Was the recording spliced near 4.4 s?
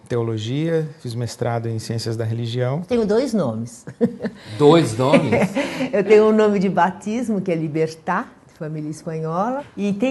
no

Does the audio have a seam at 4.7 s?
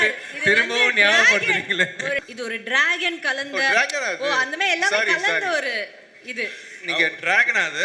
no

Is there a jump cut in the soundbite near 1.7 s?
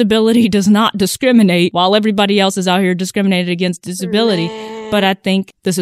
yes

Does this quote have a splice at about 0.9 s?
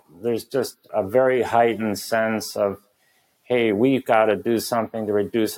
yes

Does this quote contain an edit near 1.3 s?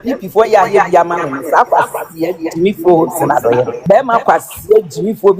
no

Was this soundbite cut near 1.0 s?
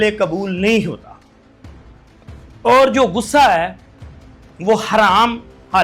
no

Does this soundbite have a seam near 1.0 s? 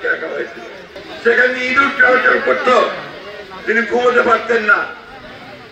yes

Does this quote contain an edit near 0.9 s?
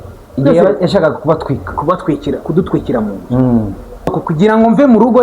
no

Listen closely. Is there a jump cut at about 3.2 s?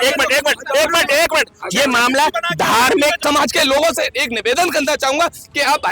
yes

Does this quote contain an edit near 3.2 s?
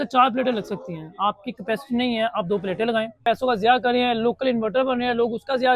yes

